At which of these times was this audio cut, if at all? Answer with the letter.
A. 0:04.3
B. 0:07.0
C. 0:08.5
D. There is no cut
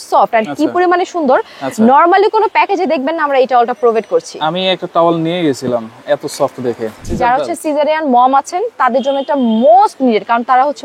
B